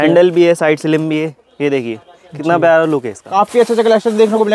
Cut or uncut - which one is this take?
cut